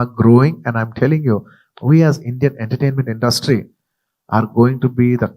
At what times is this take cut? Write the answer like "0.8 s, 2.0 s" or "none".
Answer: 1.6 s

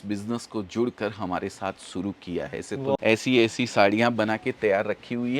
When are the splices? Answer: 3.0 s

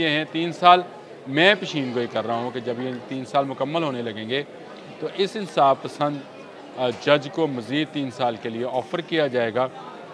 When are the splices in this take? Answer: none

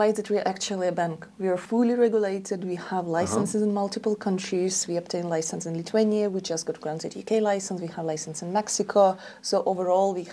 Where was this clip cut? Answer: 1.6 s

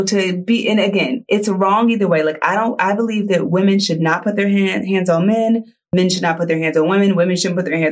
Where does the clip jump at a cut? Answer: 5.8 s

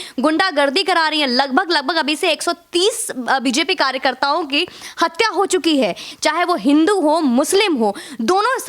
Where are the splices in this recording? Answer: 6.1 s

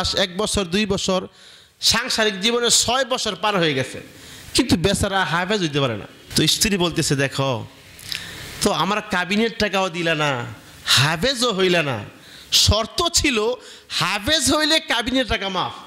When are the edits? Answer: none

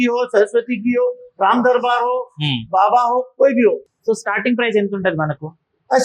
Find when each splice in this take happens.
3.9 s

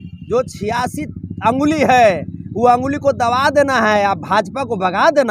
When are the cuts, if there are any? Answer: none

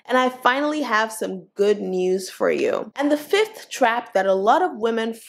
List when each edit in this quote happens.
2.9 s

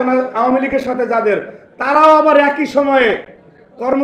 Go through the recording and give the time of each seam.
none

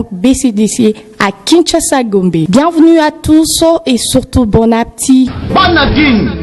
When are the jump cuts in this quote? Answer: 5.4 s

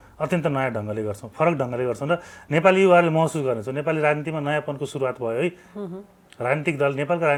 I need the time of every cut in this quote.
none

